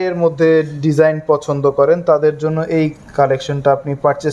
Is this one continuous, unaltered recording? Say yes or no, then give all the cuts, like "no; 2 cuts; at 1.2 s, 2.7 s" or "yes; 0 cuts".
yes; 0 cuts